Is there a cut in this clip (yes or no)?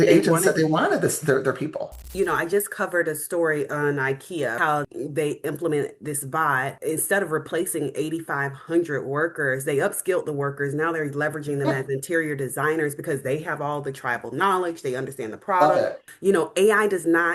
yes